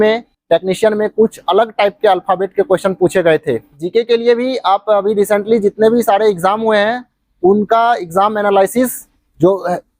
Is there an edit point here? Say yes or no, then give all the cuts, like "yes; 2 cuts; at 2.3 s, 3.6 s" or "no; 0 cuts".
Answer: yes; 1 cut; at 3.8 s